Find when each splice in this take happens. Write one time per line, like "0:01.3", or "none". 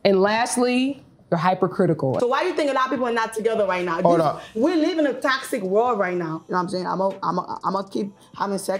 0:02.2
0:06.4